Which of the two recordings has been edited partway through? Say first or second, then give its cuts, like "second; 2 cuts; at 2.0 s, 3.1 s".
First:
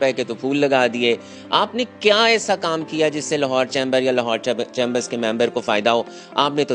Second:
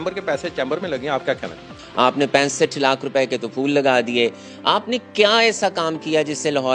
second; 1 cut; at 1.8 s